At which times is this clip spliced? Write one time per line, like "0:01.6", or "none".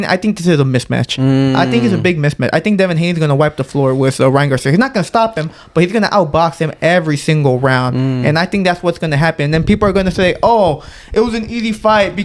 none